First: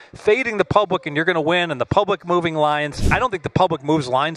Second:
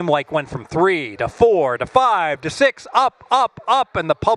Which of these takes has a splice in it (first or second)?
first